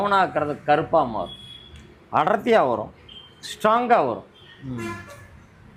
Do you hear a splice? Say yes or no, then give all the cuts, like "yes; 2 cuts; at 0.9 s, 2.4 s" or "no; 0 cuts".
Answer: no; 0 cuts